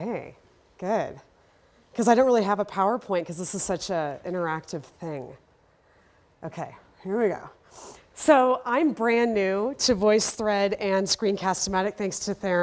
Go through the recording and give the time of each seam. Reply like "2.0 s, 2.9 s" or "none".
11.1 s